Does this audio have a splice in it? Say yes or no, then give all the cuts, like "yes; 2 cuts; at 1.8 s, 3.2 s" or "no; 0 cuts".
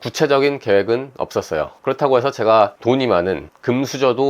yes; 1 cut; at 2.8 s